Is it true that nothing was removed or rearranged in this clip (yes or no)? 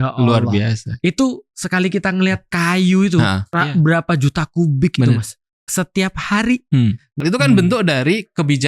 no